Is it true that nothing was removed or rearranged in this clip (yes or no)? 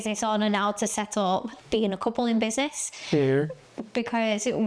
no